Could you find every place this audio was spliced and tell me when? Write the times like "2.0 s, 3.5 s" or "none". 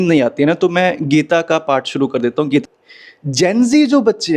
2.6 s